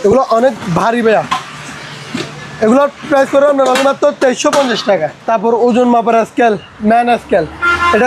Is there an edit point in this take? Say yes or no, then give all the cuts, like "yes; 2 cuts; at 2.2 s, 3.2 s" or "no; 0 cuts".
yes; 1 cut; at 5.1 s